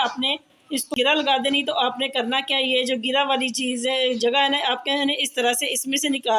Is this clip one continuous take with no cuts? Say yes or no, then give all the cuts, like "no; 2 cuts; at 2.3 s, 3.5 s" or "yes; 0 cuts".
no; 1 cut; at 1.0 s